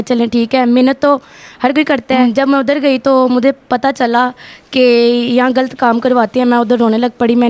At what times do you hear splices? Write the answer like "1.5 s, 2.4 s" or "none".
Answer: 2.2 s